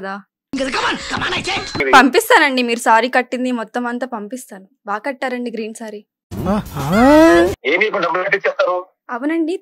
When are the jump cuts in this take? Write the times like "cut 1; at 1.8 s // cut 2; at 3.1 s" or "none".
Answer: cut 1; at 1.8 s // cut 2; at 7.6 s

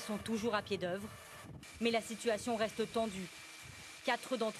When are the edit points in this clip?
cut 1; at 3.5 s

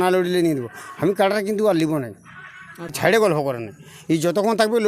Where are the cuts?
cut 1; at 2.9 s

